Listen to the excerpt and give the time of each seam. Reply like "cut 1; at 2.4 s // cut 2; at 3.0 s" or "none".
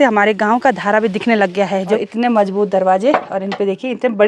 cut 1; at 2.0 s